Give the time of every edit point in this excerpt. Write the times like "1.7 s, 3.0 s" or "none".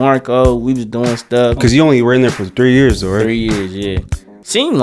1.5 s